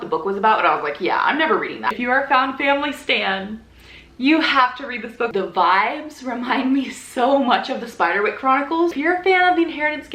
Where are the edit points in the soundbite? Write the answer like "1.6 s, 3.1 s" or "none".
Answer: 1.9 s, 5.3 s, 8.9 s